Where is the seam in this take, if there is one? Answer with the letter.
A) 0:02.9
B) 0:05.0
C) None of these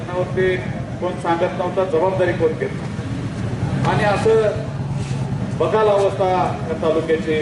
A